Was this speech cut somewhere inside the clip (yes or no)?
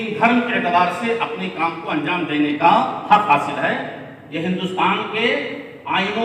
no